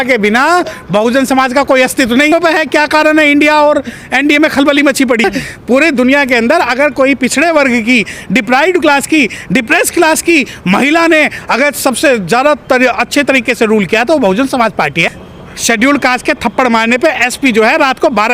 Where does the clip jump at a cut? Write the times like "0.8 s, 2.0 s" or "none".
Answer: 2.3 s, 5.2 s, 15.0 s